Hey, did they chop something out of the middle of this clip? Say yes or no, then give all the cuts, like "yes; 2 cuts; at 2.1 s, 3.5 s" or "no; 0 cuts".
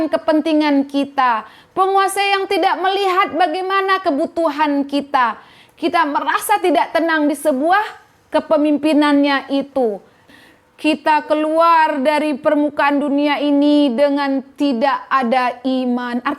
yes; 1 cut; at 10.2 s